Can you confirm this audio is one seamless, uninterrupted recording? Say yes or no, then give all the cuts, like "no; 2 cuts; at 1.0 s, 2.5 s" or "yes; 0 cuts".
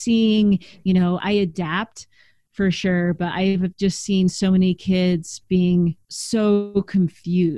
no; 2 cuts; at 1.2 s, 6.1 s